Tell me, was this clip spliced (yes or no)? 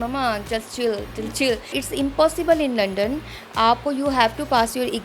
yes